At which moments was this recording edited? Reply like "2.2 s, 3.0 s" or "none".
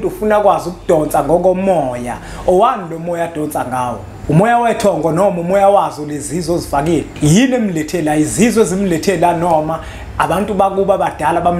4.1 s, 7.1 s